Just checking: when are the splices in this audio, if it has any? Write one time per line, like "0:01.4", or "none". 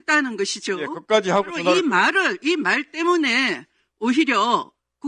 none